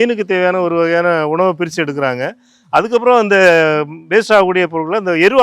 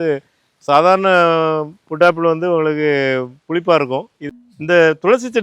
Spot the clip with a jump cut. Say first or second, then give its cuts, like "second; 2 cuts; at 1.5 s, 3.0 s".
second; 1 cut; at 4.3 s